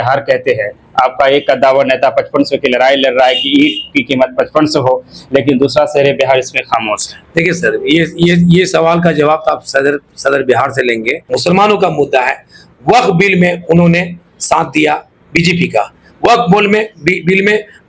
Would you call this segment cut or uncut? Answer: cut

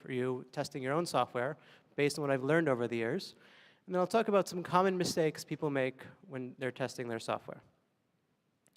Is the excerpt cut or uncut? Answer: uncut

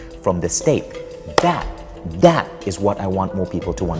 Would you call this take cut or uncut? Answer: uncut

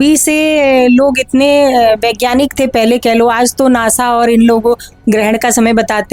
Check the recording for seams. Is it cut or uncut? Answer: uncut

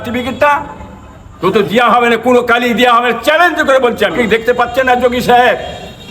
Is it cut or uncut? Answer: cut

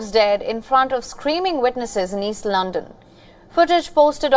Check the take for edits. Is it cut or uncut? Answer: cut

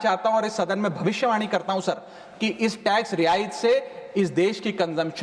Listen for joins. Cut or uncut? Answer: uncut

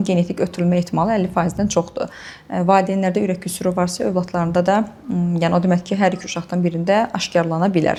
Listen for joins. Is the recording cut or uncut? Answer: uncut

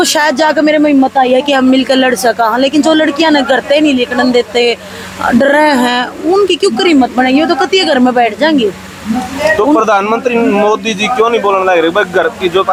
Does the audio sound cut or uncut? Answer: uncut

